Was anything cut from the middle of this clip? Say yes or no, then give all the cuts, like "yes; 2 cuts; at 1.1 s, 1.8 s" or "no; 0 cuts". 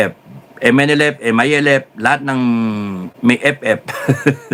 no; 0 cuts